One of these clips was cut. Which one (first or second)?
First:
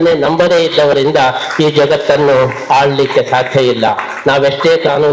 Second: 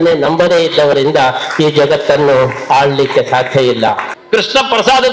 second